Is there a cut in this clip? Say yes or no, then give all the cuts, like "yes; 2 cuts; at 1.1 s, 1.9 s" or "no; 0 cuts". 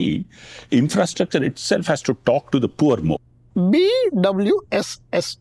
no; 0 cuts